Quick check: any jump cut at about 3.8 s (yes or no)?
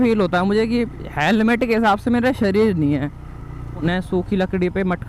yes